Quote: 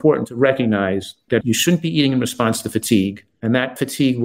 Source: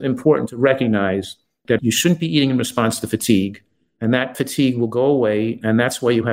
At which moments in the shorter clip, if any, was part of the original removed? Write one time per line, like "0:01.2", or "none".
0:01.1
0:03.3